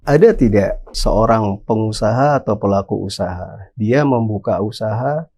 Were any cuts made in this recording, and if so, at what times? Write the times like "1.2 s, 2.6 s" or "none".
1.0 s